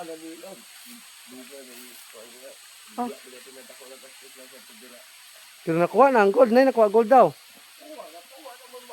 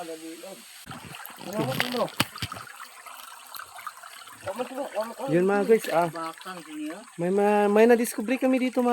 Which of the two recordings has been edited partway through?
second; 1 cut; at 1.1 s

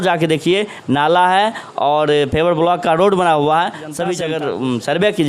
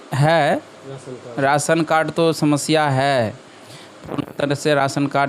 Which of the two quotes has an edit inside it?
first; 1 cut; at 4.1 s

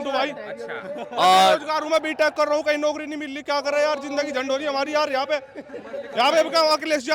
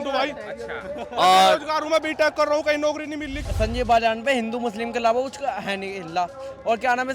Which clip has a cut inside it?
second; 1 cut; at 3.4 s

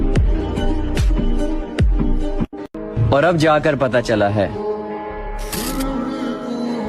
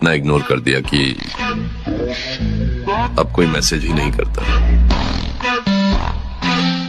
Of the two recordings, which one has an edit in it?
first; 1 cut; at 2.8 s

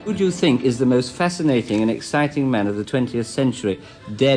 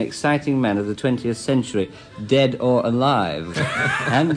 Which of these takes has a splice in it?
second; 1 cut; at 3.5 s

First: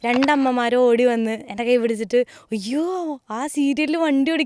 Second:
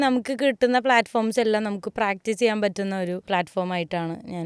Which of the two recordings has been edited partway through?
second; 1 cut; at 3.2 s

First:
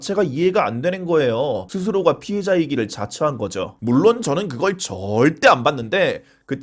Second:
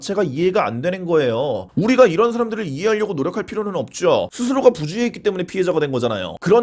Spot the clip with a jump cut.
first; 2 cuts; at 1.7 s, 3.8 s

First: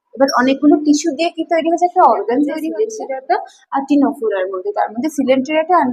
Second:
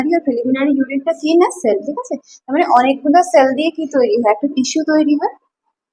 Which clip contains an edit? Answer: first; 1 cut; at 2.7 s

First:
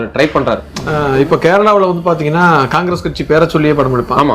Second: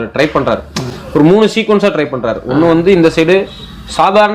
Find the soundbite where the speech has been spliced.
first; 1 cut; at 1.0 s

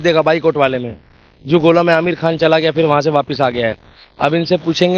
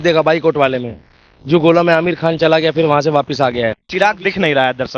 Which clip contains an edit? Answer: second; 1 cut; at 3.9 s

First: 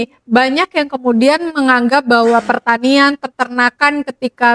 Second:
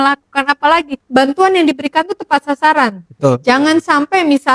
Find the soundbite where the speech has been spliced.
second; 1 cut; at 1.0 s

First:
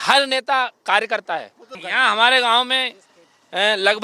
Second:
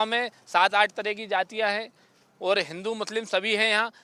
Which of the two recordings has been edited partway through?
first; 1 cut; at 1.8 s

